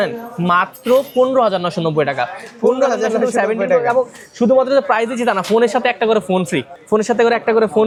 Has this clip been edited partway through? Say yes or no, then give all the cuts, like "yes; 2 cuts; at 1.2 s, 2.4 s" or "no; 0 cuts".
no; 0 cuts